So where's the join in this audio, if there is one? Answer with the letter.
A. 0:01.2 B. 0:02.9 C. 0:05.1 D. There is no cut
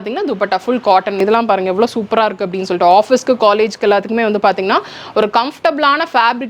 A